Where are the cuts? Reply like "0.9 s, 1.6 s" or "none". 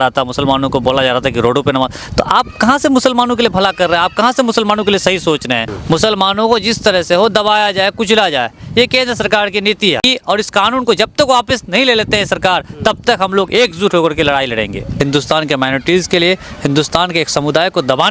5.7 s, 10.0 s, 14.9 s